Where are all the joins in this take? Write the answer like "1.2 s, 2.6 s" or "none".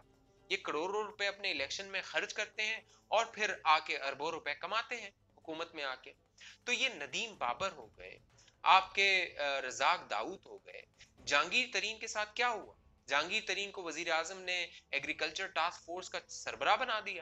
none